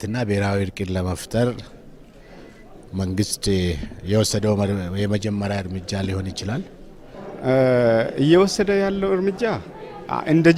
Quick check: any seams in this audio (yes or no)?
no